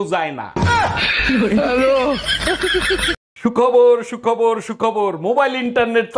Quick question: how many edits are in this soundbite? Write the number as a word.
one